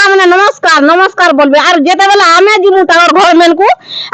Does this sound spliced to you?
no; 0 cuts

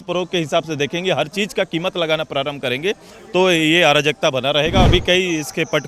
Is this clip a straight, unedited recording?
no; 1 cut; at 4.9 s

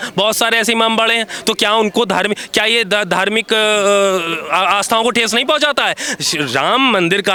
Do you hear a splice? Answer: no; 0 cuts

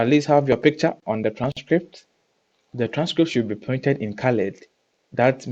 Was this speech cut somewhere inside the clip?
no; 0 cuts

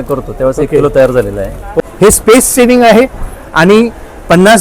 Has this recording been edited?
yes; 1 cut; at 1.7 s

